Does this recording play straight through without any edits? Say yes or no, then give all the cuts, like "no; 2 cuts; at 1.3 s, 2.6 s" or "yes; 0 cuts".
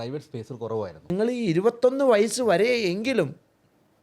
no; 1 cut; at 1.1 s